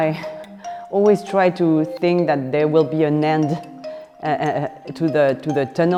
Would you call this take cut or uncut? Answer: uncut